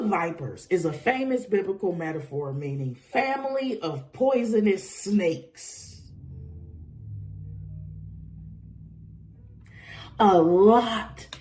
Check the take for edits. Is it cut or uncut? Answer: cut